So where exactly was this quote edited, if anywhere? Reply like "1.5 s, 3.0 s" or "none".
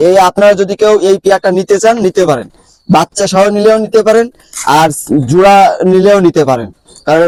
none